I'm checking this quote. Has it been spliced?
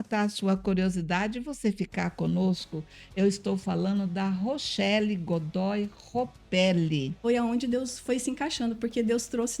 yes; 1 cut; at 7.1 s

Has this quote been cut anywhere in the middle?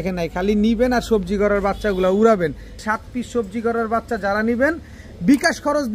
yes; 1 cut; at 2.8 s

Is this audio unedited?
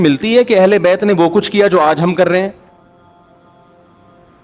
yes; 0 cuts

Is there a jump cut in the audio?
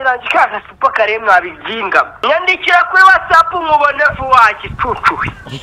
yes; 1 cut; at 2.1 s

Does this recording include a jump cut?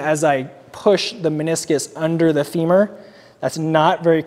no; 0 cuts

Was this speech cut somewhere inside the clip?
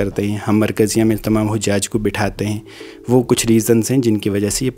no; 0 cuts

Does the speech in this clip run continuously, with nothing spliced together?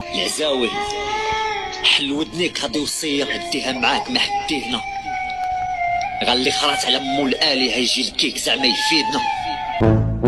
yes; 0 cuts

